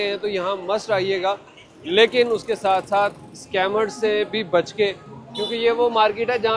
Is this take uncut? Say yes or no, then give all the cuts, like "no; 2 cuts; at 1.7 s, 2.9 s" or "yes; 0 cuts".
yes; 0 cuts